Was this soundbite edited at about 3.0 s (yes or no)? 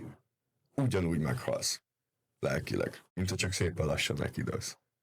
yes